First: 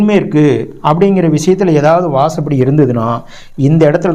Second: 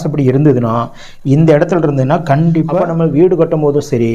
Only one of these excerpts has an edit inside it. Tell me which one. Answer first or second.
second